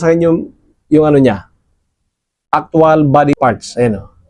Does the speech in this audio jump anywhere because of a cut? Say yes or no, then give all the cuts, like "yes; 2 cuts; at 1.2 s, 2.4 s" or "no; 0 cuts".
no; 0 cuts